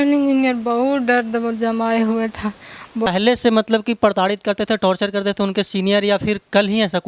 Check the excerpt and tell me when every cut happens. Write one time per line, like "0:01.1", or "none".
0:03.1